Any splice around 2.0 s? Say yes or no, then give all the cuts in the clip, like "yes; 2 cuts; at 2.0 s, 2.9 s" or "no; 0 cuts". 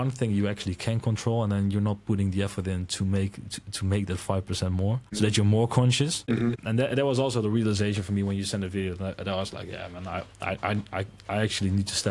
no; 2 cuts; at 5.0 s, 6.5 s